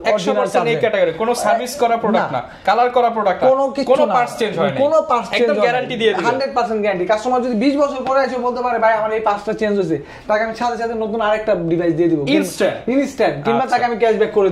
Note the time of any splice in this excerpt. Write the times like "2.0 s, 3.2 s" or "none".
none